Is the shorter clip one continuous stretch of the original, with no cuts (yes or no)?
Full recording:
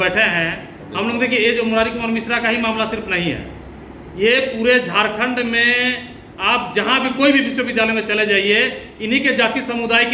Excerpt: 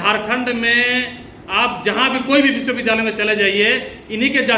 yes